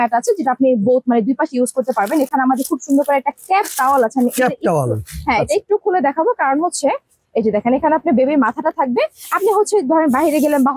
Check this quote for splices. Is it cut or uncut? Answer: uncut